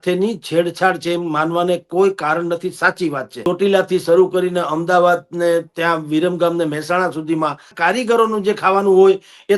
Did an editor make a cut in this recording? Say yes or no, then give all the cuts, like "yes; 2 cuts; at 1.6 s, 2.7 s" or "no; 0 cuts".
yes; 2 cuts; at 3.5 s, 7.7 s